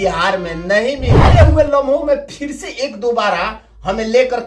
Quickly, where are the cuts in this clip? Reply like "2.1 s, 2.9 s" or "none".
1.1 s